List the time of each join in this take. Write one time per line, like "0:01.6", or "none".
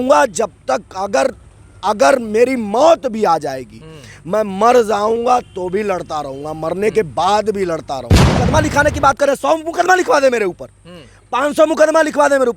0:08.4